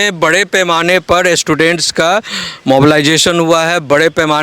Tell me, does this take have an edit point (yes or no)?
no